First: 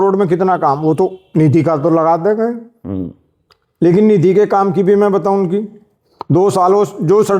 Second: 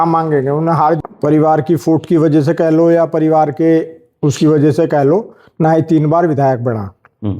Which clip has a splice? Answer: second; 1 cut; at 1.0 s

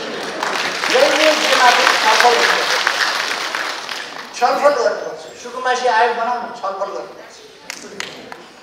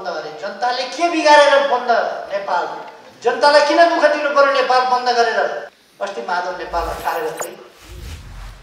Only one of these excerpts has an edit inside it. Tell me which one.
second; 1 cut; at 5.8 s

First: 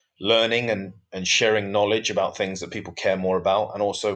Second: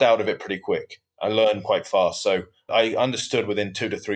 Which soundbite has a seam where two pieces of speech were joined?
second; 1 cut; at 2.7 s

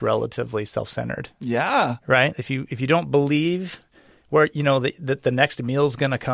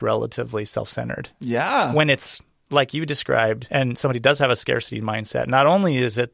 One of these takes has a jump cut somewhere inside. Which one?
second; 2 cuts; at 1.9 s, 3.6 s

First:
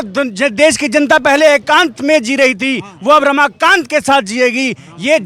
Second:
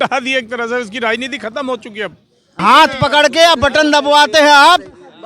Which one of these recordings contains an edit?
second; 1 cut; at 2.6 s

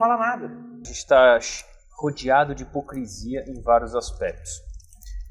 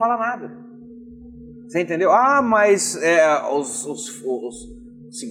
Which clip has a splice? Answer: first; 1 cut; at 0.9 s

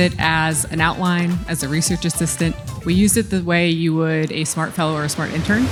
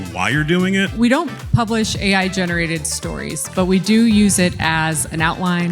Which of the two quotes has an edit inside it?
second; 1 cut; at 0.9 s

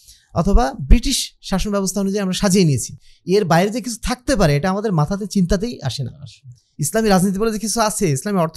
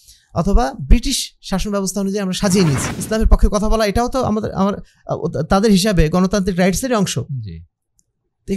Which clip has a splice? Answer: second; 1 cut; at 2.9 s

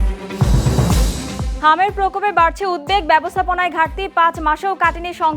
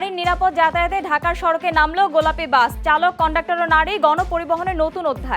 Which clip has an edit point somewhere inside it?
first; 1 cut; at 1.5 s

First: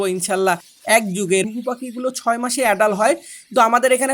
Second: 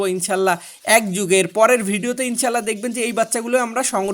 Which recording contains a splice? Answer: first; 1 cut; at 1.5 s

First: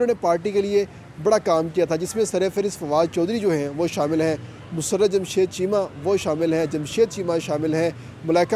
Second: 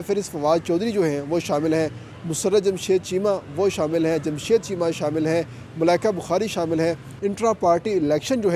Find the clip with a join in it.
second; 1 cut; at 7.1 s

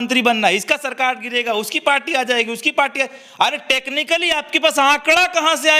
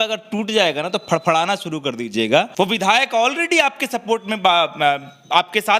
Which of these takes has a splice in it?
second; 1 cut; at 2.5 s

